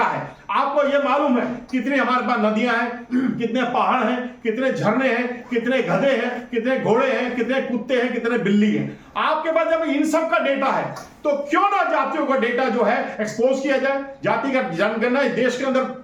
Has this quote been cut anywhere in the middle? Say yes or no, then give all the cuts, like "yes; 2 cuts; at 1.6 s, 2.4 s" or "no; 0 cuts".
no; 0 cuts